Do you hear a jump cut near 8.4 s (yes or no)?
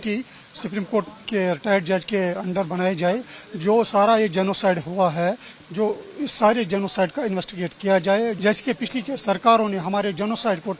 yes